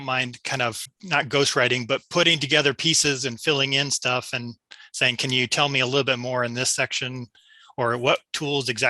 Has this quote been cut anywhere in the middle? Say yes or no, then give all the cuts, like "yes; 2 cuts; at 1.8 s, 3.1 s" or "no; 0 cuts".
yes; 1 cut; at 0.9 s